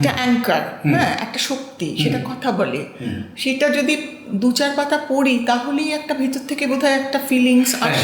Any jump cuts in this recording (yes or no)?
no